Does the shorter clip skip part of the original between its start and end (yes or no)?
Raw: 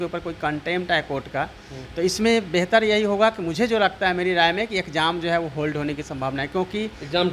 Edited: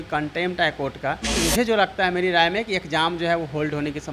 yes